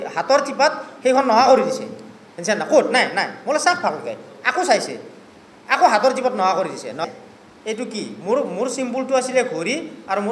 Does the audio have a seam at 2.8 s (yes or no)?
no